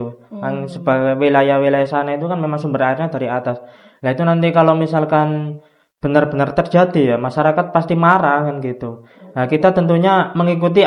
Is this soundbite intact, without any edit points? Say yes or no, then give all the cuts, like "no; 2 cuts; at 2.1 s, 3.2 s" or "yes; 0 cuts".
yes; 0 cuts